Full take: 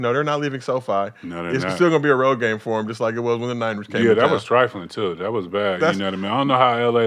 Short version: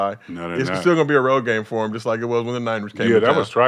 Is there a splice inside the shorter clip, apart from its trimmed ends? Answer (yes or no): no